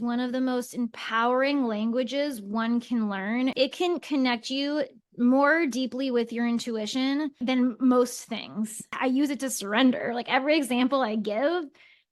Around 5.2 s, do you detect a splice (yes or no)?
no